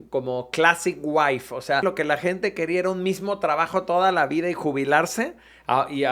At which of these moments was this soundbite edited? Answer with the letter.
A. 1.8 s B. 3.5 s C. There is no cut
A